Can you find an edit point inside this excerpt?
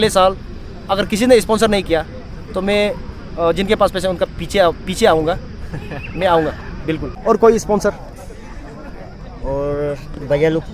yes; 1 cut; at 7.1 s

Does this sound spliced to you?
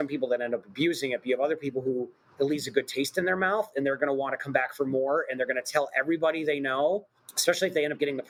no; 0 cuts

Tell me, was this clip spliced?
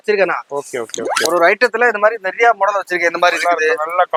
no; 0 cuts

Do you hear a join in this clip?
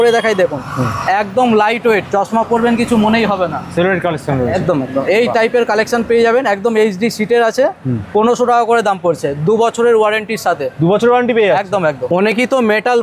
no; 0 cuts

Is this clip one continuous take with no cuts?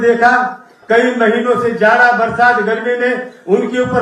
yes; 0 cuts

